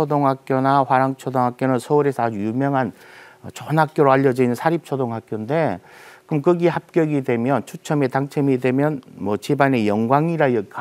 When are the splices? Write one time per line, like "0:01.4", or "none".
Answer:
none